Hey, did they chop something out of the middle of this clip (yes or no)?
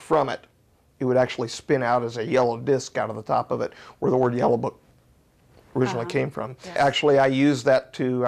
yes